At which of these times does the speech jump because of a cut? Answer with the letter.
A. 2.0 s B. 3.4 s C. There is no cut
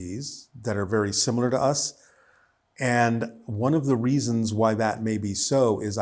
C